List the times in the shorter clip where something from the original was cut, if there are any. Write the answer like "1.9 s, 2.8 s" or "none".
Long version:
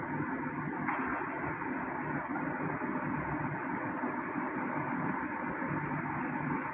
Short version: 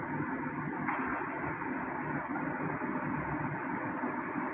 none